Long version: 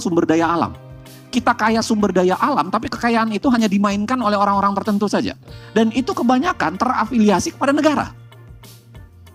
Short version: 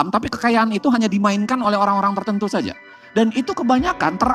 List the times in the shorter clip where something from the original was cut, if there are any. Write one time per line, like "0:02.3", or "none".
none